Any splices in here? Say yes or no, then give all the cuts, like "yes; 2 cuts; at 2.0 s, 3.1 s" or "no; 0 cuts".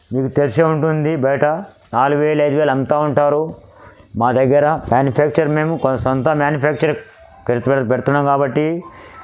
no; 0 cuts